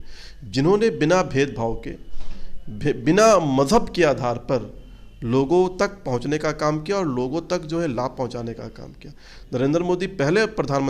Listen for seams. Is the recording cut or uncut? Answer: uncut